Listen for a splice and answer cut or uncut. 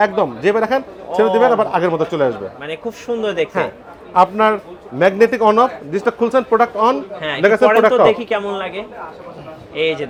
uncut